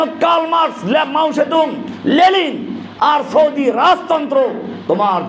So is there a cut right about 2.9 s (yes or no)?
no